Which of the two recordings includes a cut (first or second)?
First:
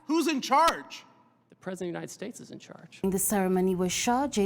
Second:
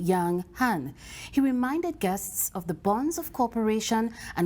first